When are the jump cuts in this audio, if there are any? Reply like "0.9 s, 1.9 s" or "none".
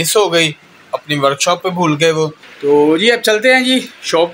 2.5 s